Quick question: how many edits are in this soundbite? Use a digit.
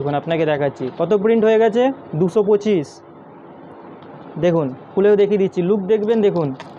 0